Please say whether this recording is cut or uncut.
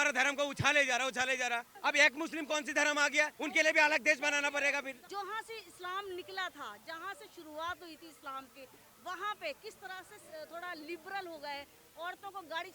cut